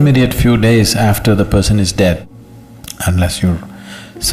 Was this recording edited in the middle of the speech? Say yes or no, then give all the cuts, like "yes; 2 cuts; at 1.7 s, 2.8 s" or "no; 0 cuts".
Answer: yes; 1 cut; at 2.2 s